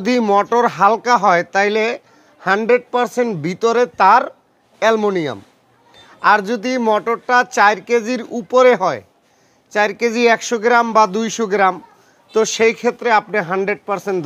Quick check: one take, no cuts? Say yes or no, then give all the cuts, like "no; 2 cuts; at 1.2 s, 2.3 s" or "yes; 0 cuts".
yes; 0 cuts